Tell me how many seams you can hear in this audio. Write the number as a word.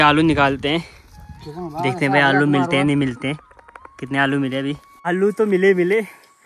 one